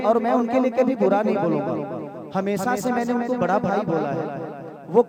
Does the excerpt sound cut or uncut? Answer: uncut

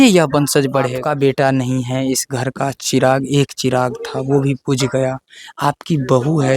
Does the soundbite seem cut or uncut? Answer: cut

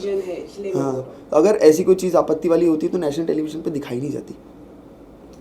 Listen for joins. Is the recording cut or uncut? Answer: uncut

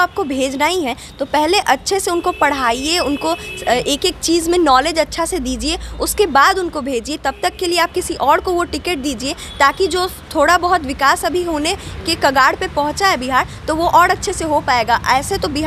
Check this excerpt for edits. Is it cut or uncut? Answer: uncut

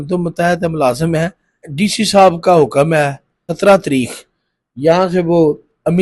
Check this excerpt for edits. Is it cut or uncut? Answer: cut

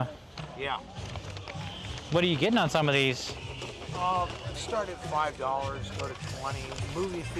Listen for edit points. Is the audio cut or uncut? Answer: uncut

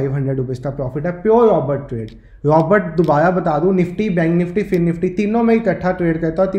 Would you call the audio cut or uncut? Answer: uncut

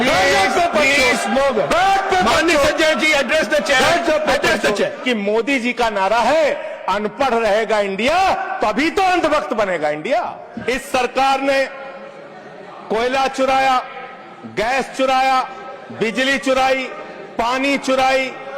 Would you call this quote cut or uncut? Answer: cut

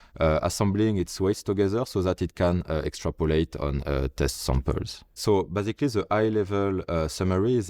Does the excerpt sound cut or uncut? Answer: cut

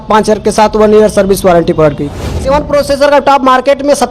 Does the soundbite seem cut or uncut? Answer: cut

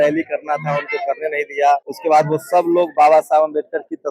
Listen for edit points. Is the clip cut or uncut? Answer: cut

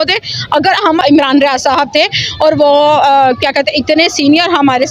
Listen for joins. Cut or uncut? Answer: cut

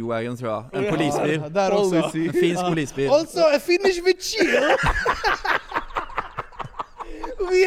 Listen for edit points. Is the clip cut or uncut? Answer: uncut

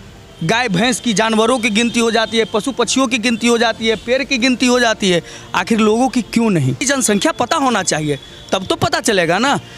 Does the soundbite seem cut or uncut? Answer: cut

